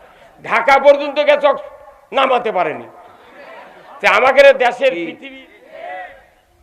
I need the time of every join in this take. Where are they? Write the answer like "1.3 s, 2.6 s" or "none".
5.1 s